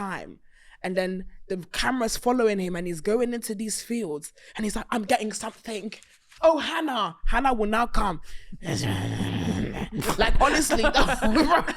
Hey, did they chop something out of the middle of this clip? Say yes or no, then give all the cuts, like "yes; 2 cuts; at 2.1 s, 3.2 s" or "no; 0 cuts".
yes; 1 cut; at 6.3 s